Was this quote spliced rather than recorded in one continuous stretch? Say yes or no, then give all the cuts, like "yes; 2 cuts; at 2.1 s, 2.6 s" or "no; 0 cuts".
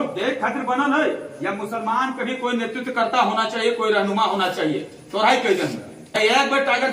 no; 0 cuts